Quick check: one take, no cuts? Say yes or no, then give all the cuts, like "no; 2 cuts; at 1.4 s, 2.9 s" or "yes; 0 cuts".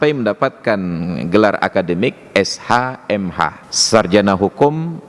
no; 1 cut; at 3.7 s